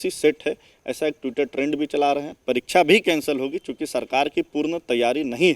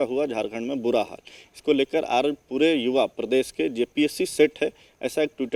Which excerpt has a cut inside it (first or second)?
first